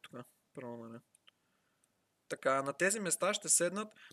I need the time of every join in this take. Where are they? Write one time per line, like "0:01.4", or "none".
none

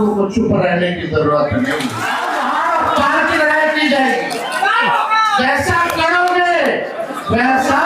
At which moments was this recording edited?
0:02.1

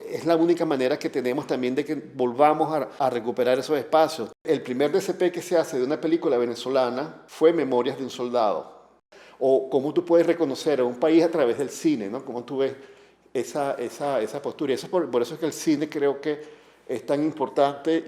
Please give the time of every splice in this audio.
0:04.4
0:09.1

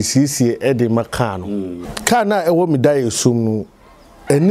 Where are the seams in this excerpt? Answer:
0:01.9

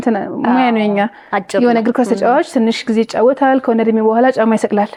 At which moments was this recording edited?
none

